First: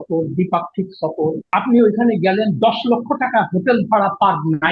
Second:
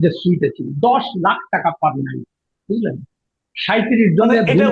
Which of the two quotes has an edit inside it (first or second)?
first